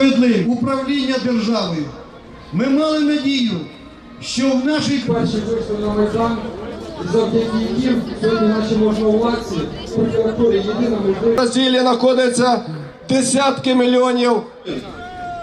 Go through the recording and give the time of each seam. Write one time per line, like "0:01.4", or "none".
none